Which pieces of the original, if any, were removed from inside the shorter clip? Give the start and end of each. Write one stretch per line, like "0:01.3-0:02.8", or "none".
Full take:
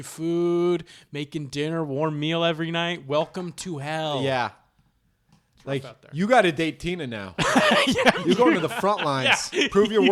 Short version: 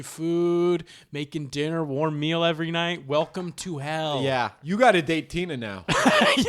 0:04.6-0:06.1